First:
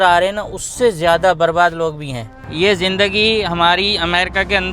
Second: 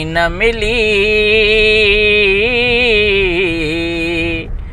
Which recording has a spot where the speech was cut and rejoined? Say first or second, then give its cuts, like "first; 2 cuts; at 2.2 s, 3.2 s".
first; 1 cut; at 2.4 s